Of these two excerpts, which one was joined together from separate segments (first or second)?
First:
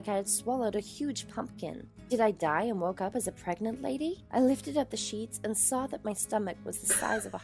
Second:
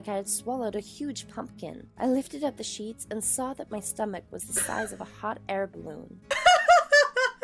second